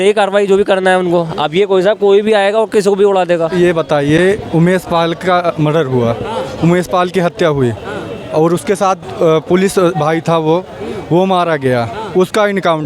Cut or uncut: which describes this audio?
cut